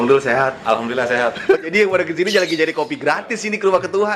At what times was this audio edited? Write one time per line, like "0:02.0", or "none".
0:01.7